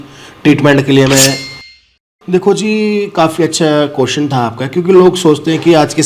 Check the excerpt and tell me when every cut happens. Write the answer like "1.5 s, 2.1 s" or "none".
1.7 s